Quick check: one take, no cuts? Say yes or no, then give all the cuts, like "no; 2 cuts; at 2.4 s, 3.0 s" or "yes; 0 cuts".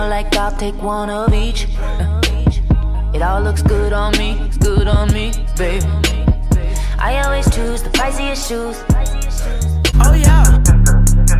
no; 1 cut; at 9.9 s